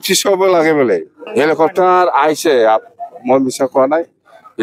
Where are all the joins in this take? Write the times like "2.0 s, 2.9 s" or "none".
1.2 s